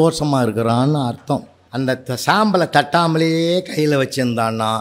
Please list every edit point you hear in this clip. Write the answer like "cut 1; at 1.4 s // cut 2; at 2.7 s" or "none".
cut 1; at 1.6 s